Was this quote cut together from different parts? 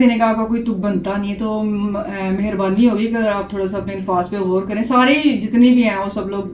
no; 0 cuts

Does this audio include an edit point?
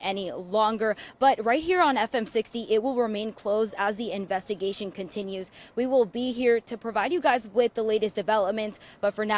no; 0 cuts

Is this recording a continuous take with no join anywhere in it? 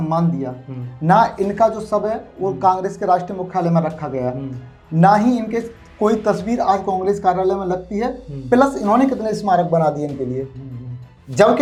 yes; 0 cuts

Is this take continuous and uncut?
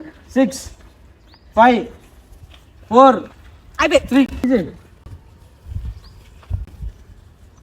no; 1 cut; at 4.4 s

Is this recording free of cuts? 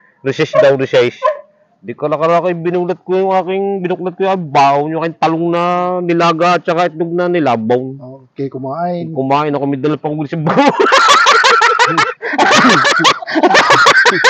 yes; 0 cuts

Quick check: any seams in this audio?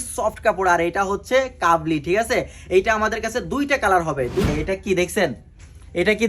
yes; 1 cut; at 4.5 s

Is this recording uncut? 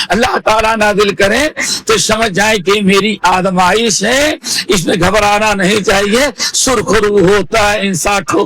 yes; 0 cuts

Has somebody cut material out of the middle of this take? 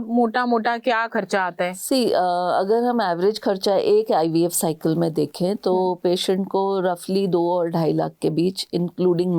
no; 0 cuts

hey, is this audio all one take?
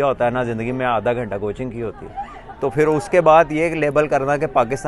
yes; 0 cuts

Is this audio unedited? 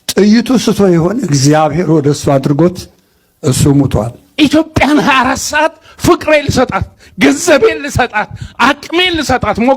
no; 1 cut; at 4.3 s

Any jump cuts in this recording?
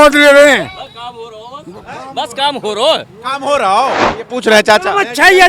yes; 1 cut; at 4.1 s

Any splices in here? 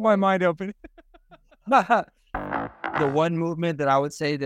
yes; 1 cut; at 2.6 s

